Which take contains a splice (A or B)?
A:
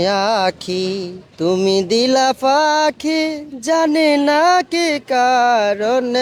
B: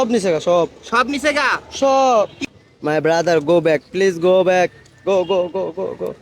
B